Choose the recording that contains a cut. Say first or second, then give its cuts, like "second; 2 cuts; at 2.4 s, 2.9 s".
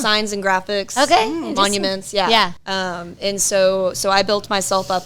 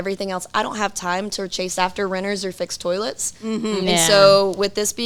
first; 1 cut; at 2.6 s